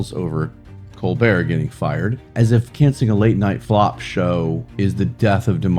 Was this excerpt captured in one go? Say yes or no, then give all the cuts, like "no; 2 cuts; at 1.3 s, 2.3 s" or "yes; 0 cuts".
no; 3 cuts; at 2.2 s, 3.6 s, 4.7 s